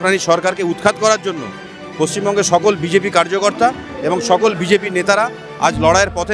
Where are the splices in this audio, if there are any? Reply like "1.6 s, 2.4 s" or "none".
none